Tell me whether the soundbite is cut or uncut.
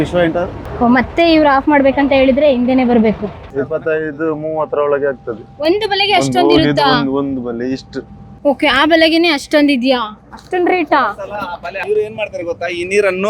cut